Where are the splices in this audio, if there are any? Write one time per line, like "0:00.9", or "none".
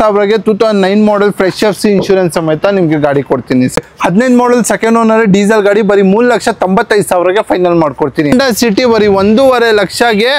0:03.8
0:08.3